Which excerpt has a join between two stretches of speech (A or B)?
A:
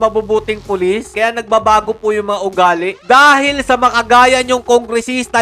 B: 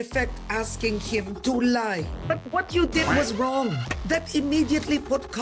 B